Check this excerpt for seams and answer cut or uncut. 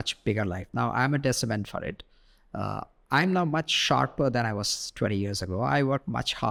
uncut